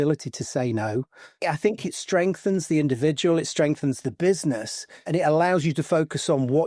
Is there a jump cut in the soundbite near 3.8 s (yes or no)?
no